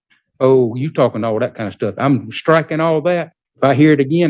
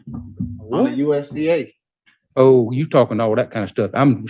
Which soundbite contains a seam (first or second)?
first